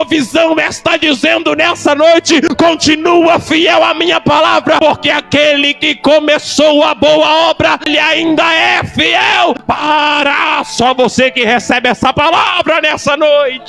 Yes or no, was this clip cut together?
yes